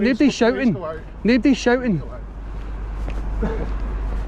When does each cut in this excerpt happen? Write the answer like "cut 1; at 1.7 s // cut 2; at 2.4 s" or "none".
none